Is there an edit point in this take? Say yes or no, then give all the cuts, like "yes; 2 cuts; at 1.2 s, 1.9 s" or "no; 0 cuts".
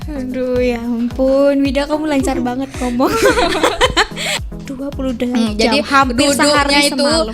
yes; 1 cut; at 4.3 s